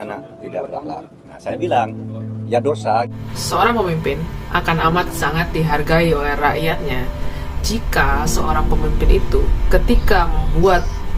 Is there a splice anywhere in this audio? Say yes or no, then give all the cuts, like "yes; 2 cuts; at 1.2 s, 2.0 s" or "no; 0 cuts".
no; 0 cuts